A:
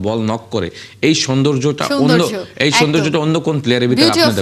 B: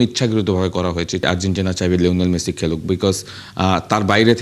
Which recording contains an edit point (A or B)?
B